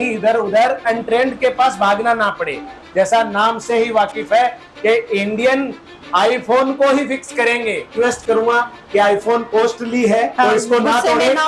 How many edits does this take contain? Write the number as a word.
three